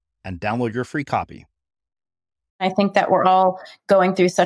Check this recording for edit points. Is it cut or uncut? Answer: cut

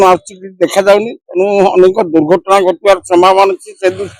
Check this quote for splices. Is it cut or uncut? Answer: uncut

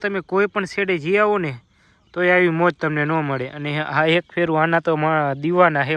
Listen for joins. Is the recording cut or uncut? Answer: uncut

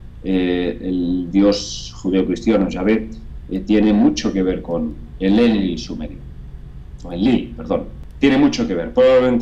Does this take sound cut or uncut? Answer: cut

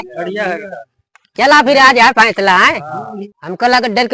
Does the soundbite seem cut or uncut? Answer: cut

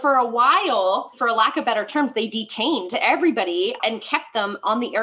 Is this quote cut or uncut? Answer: cut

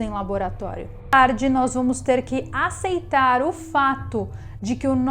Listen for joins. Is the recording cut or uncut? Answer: cut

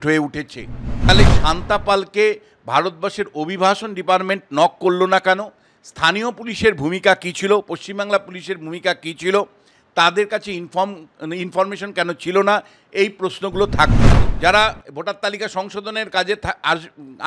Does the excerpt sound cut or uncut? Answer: cut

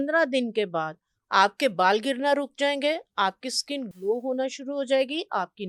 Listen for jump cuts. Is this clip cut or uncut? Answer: uncut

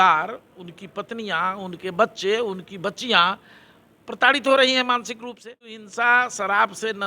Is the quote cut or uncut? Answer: cut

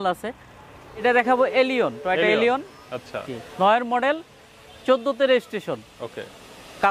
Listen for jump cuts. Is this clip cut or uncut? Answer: cut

